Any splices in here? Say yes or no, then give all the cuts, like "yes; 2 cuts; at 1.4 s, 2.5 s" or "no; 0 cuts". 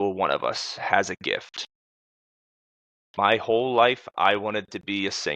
no; 0 cuts